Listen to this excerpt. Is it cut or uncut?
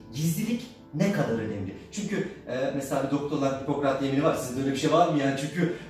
uncut